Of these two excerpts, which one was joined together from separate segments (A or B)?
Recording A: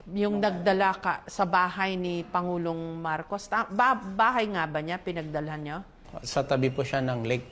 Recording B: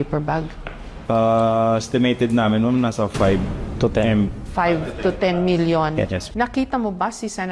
B